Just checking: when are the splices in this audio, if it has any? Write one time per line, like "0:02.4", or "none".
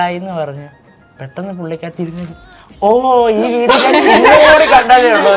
none